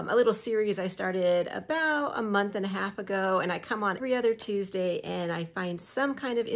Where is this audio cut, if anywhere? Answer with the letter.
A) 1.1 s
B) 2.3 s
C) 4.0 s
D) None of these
C